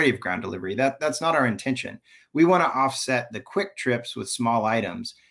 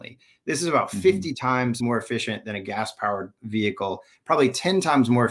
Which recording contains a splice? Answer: second; 2 cuts; at 1.8 s, 3.4 s

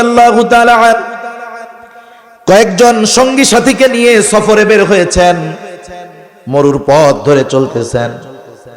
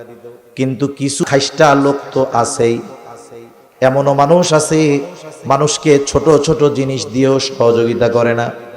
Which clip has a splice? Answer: second; 1 cut; at 1.2 s

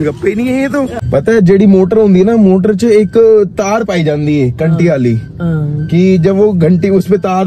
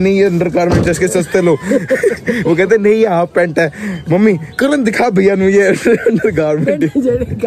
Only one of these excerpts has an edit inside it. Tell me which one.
first; 1 cut; at 1.0 s

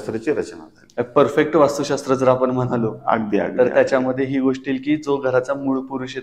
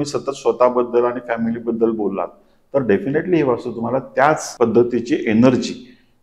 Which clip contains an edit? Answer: second; 1 cut; at 4.5 s

